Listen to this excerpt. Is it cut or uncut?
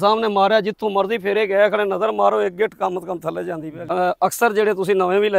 cut